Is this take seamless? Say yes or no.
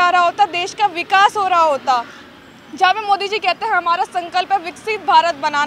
yes